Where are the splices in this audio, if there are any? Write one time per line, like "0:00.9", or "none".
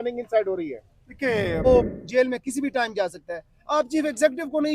0:01.7